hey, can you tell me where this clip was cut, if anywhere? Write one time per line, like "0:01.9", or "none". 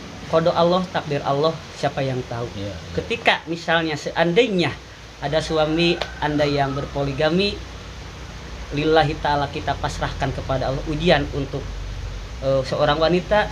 none